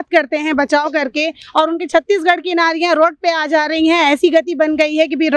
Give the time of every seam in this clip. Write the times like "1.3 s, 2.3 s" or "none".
none

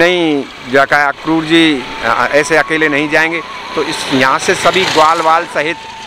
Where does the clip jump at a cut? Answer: none

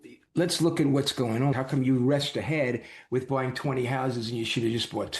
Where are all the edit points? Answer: 1.5 s

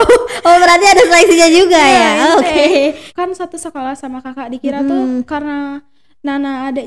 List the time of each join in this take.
3.0 s

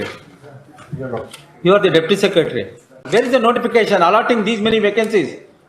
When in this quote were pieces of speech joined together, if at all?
3.0 s

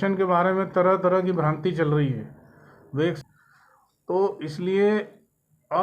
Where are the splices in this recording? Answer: 3.2 s

